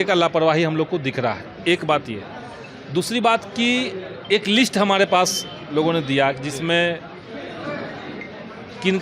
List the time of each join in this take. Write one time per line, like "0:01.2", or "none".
none